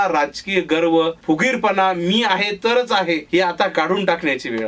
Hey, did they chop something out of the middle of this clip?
yes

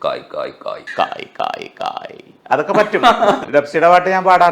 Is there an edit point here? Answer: yes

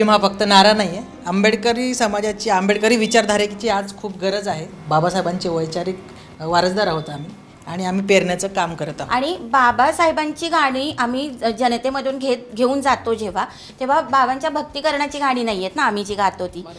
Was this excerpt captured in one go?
no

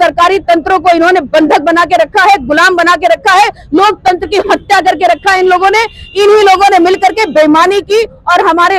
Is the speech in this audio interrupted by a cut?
no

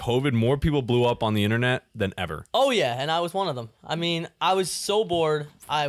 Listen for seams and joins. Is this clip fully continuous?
yes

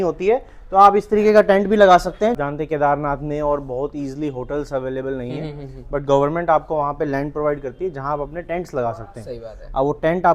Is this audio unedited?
yes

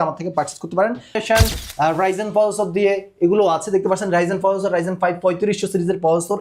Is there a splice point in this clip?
yes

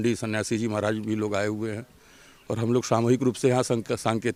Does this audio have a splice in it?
no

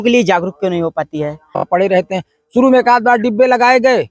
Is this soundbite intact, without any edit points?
no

